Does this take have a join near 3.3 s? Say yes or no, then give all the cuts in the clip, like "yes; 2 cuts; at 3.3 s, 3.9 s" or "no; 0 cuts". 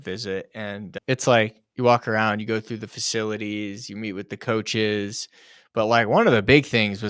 no; 1 cut; at 0.9 s